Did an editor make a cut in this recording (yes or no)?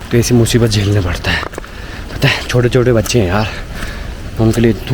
no